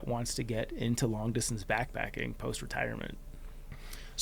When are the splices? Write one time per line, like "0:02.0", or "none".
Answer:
none